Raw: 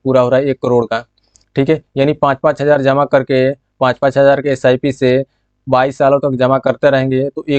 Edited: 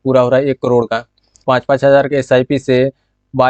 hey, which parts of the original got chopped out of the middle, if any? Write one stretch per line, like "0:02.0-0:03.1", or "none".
0:01.3-0:03.7